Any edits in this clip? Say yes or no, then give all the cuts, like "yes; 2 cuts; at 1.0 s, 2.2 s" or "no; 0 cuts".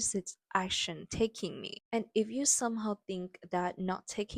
yes; 1 cut; at 1.7 s